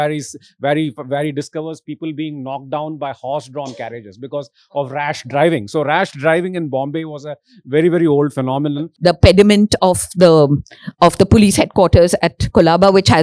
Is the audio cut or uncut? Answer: cut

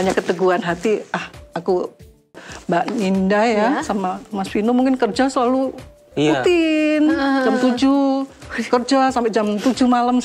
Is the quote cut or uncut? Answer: cut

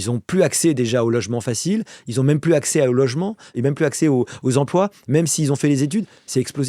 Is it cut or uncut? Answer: cut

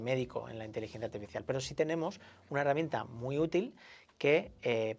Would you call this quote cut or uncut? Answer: uncut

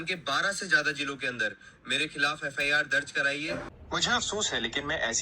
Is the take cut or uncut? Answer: cut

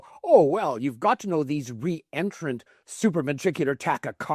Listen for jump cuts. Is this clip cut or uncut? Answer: uncut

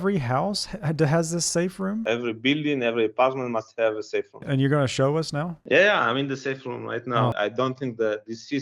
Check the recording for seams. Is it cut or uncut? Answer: cut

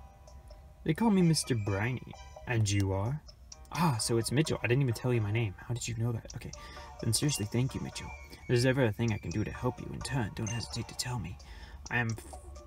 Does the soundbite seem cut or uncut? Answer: uncut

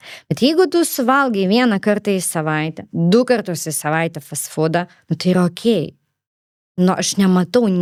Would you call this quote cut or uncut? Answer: uncut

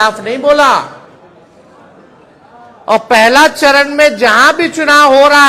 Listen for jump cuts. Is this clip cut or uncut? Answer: uncut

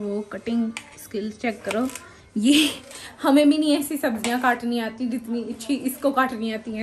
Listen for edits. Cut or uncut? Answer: uncut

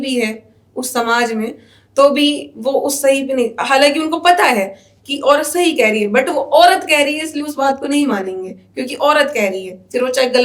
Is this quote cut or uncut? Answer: uncut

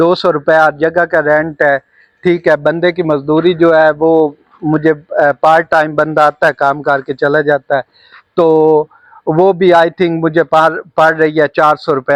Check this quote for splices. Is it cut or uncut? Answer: uncut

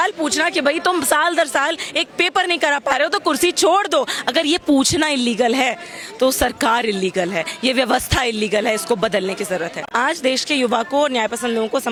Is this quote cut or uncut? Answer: uncut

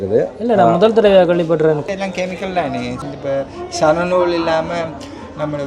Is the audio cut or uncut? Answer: cut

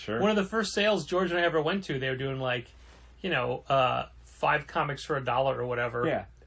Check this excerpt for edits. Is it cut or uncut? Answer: uncut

